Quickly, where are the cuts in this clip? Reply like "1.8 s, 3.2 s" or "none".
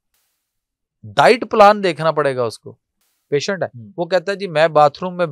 3.0 s